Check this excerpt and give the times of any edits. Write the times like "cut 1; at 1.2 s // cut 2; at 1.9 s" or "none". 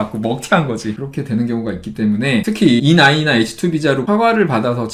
cut 1; at 1.0 s // cut 2; at 2.7 s // cut 3; at 4.0 s